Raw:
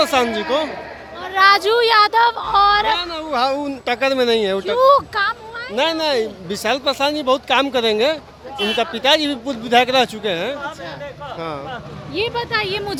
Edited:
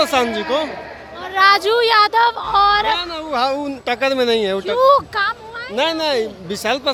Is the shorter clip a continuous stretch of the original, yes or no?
yes